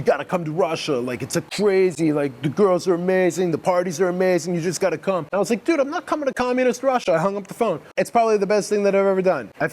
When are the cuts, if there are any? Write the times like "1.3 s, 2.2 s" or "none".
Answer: 5.3 s, 7.8 s